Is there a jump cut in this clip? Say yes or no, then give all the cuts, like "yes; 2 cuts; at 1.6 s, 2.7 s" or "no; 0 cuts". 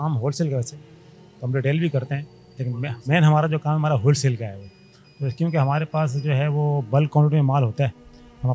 no; 0 cuts